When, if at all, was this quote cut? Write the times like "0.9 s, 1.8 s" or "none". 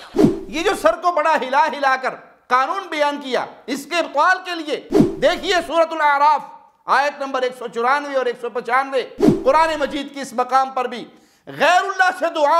9.2 s